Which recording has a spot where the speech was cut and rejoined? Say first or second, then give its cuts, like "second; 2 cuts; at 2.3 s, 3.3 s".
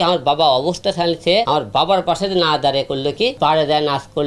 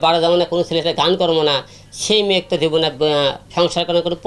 first; 2 cuts; at 1.5 s, 3.3 s